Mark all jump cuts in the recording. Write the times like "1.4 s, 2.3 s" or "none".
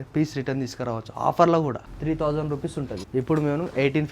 1.9 s, 3.0 s

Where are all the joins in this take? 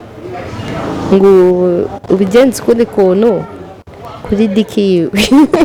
none

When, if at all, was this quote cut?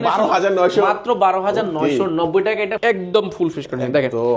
2.8 s

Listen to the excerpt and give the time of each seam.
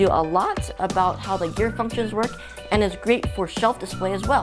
none

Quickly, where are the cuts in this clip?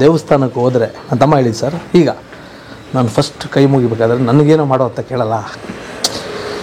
none

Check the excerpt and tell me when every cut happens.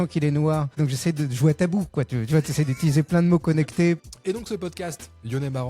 0.8 s, 4.0 s

